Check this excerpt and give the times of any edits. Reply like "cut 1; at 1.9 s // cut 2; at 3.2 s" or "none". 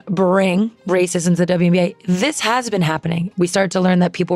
cut 1; at 3.3 s